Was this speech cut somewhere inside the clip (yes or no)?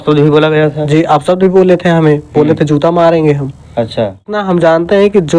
yes